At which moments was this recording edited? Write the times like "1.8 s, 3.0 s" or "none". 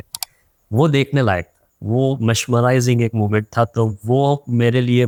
none